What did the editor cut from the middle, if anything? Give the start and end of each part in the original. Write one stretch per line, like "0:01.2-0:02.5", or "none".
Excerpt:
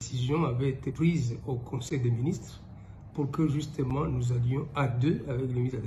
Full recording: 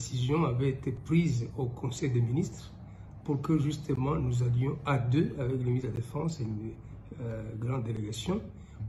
0:00.9-0:01.0